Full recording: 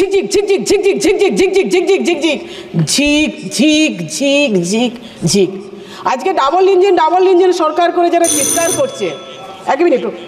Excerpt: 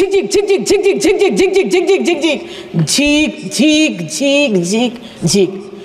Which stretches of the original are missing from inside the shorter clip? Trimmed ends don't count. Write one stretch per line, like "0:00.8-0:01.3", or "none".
none